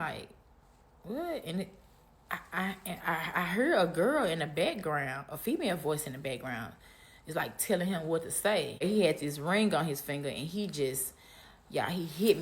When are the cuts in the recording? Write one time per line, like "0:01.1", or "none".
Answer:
0:08.8